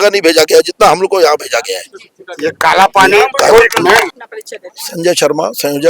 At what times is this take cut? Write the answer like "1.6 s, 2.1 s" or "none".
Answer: none

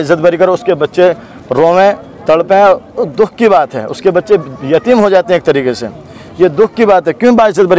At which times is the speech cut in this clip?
none

